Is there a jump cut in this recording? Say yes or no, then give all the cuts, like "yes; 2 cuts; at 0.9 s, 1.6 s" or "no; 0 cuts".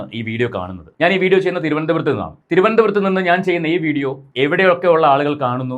no; 0 cuts